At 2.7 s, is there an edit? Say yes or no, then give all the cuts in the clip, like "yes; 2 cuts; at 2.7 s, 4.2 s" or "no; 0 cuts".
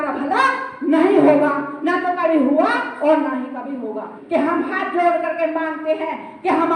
no; 1 cut; at 4.1 s